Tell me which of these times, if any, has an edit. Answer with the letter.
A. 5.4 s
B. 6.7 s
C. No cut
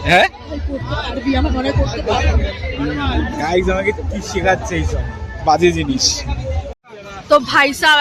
B